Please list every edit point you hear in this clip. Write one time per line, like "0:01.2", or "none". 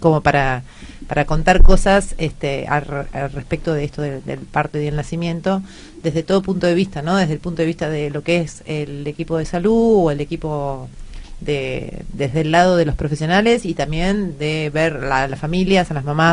0:11.9

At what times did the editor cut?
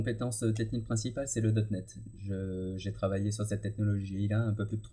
none

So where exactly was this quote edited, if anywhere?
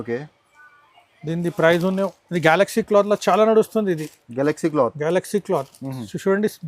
0:02.2

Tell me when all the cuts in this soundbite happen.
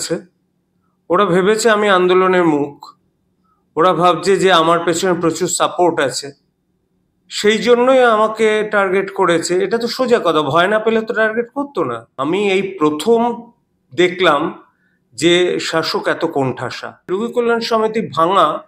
0:12.1
0:17.1

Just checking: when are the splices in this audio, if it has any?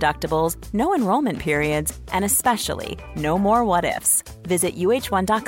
none

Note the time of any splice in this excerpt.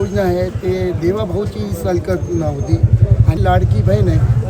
0:03.4

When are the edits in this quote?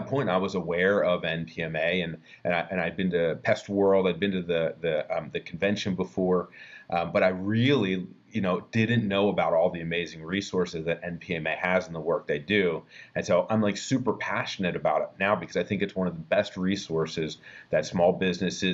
none

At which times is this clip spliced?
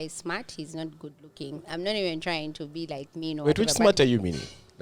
0:01.7

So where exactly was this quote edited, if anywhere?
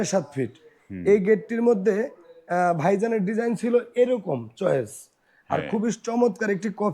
none

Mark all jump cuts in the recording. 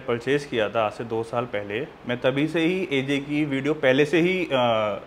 none

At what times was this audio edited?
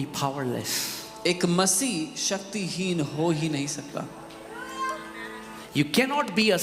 0:05.6

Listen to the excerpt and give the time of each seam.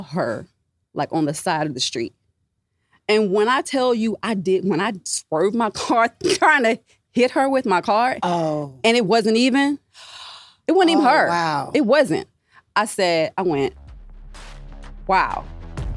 none

